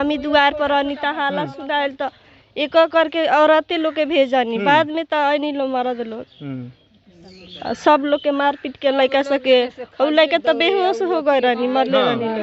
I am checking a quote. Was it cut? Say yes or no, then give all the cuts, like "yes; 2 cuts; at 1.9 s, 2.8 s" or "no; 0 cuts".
no; 0 cuts